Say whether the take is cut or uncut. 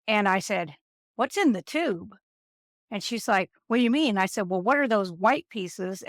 uncut